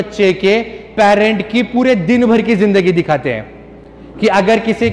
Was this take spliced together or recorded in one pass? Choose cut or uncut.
uncut